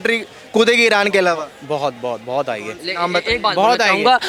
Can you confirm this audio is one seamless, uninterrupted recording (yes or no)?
yes